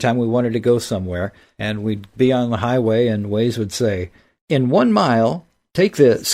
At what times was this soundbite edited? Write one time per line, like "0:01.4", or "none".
0:04.3